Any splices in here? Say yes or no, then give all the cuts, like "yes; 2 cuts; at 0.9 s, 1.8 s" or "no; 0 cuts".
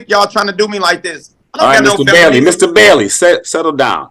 no; 0 cuts